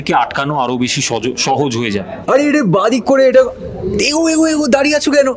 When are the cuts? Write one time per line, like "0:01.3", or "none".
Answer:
0:02.1